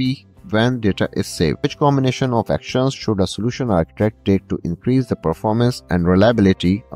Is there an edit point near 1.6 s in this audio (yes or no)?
yes